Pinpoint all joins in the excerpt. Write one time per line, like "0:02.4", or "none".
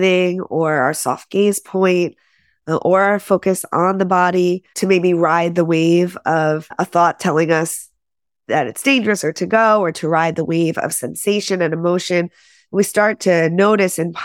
none